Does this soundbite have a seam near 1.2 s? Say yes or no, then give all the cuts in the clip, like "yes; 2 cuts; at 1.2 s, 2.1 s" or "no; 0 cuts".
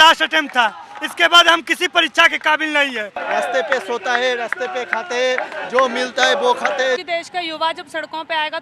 no; 2 cuts; at 3.2 s, 7.0 s